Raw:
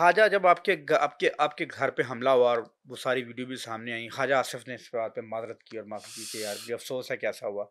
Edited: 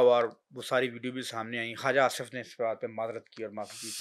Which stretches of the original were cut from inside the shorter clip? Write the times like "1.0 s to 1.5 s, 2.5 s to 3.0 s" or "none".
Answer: none